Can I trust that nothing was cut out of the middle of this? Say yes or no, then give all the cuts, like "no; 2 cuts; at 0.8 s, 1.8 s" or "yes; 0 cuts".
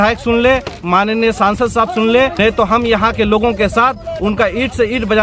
no; 1 cut; at 2.3 s